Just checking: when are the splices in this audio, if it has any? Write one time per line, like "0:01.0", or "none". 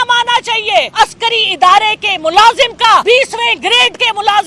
0:00.9
0:03.0